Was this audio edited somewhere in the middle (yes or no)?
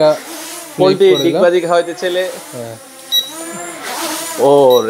no